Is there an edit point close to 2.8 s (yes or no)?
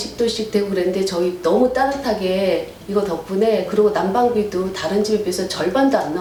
no